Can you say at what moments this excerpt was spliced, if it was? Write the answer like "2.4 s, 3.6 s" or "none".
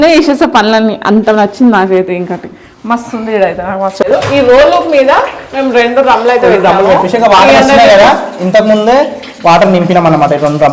4.0 s